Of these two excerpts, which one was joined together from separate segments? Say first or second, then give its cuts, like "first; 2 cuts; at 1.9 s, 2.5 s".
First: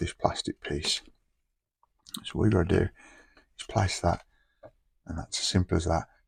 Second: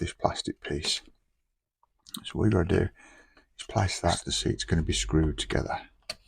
second; 1 cut; at 4.3 s